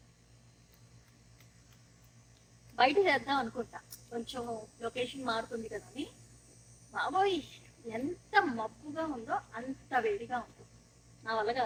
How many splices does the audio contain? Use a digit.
0